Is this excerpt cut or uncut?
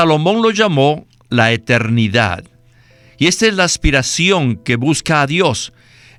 uncut